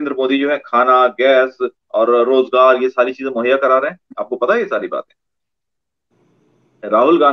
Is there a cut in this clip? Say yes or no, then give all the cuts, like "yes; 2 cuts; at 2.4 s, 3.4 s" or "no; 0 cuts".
no; 0 cuts